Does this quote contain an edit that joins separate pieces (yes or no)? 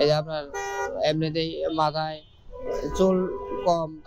no